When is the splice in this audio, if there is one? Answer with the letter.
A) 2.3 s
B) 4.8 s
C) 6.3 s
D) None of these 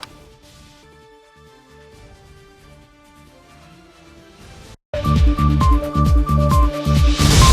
B